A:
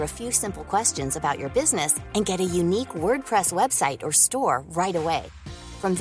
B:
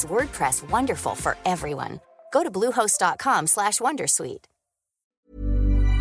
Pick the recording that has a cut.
B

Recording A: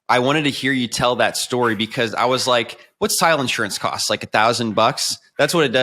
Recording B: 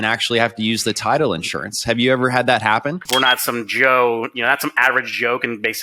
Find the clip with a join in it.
B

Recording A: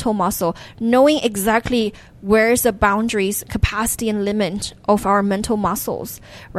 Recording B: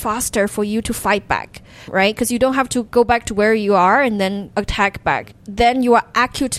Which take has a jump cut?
B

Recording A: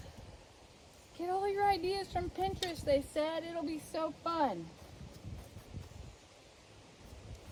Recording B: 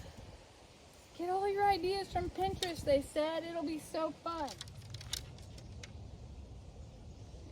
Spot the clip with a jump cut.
B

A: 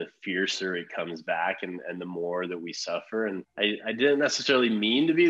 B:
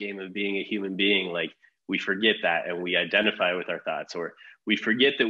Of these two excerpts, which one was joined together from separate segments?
A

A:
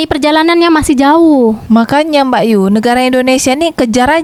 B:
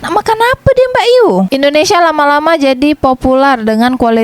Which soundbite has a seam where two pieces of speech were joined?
B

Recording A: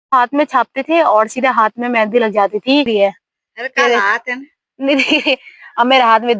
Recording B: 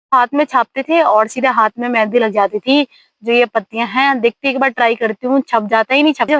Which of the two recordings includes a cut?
A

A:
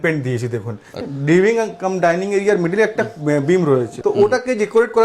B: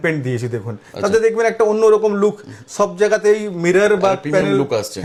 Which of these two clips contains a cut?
A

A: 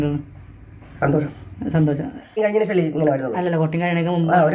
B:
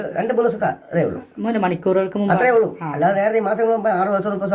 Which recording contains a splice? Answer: A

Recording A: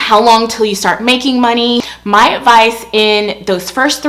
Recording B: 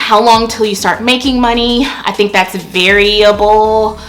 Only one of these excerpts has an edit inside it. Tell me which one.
A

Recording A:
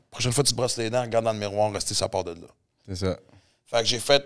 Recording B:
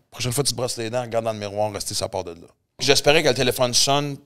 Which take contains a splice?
B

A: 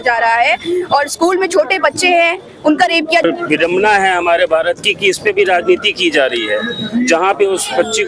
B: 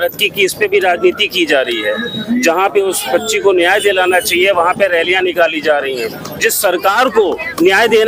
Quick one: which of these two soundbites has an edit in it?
A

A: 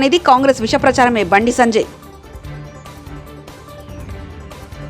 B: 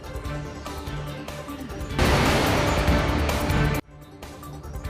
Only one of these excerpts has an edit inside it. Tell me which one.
B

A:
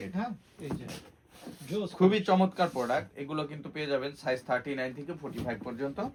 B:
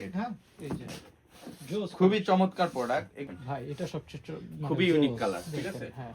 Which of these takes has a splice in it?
B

